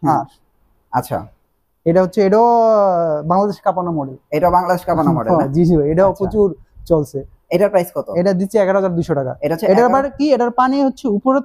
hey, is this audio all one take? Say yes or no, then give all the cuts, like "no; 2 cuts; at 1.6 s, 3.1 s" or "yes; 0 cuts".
yes; 0 cuts